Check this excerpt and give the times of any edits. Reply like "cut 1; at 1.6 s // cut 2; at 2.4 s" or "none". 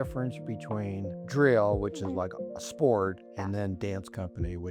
cut 1; at 1.2 s

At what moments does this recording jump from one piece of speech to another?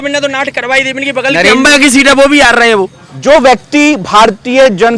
cut 1; at 3.0 s

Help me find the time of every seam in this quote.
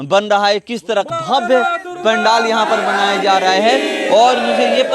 cut 1; at 1.1 s

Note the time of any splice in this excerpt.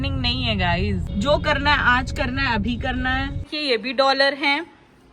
cut 1; at 1.1 s // cut 2; at 3.5 s

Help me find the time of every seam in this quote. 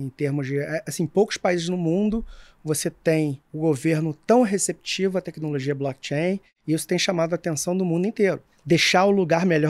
cut 1; at 3.4 s // cut 2; at 8.5 s

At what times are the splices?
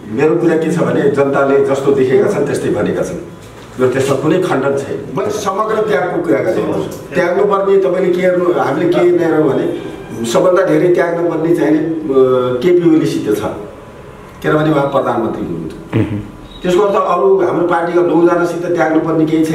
cut 1; at 5.1 s

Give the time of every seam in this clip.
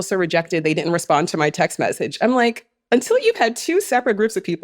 none

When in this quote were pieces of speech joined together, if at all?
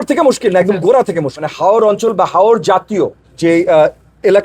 cut 1; at 1.4 s // cut 2; at 3.3 s

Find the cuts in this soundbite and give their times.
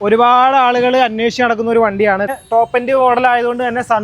cut 1; at 2.3 s

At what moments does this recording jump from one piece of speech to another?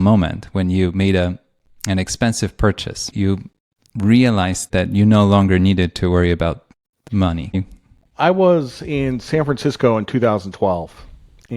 cut 1; at 3.1 s // cut 2; at 4.7 s // cut 3; at 7.6 s

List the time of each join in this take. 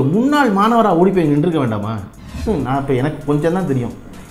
cut 1; at 2.4 s

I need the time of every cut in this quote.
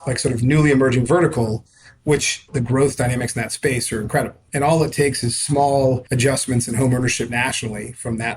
cut 1; at 2.5 s // cut 2; at 4.4 s // cut 3; at 6.1 s

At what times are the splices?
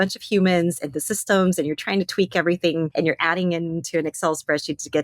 cut 1; at 2.9 s

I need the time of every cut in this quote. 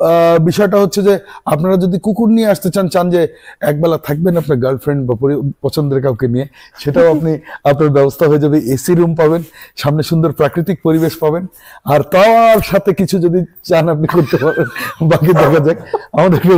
none

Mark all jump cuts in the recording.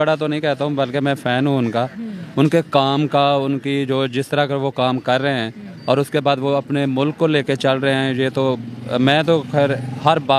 none

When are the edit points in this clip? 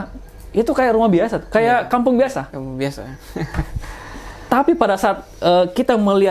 none

